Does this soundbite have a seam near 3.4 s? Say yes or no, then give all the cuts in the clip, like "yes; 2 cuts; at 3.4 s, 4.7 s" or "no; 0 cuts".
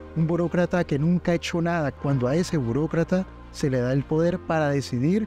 no; 1 cut; at 1.9 s